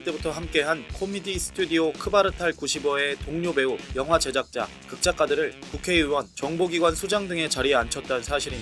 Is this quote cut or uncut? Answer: uncut